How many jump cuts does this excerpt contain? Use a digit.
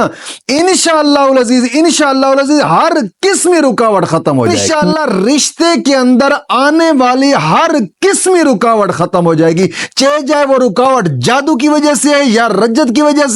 1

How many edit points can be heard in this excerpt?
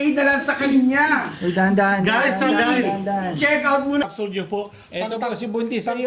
1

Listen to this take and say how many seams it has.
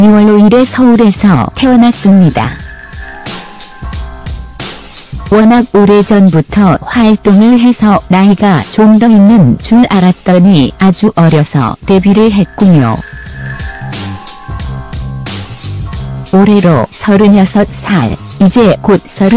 1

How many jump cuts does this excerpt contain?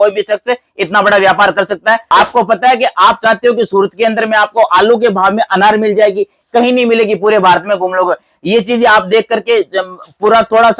1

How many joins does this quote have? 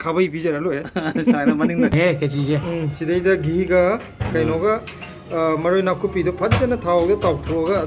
1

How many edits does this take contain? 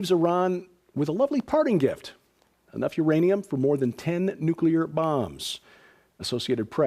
0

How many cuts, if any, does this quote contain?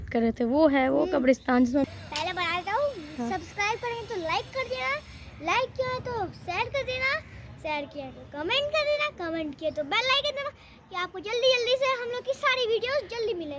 1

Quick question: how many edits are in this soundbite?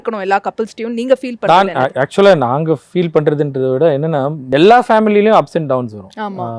1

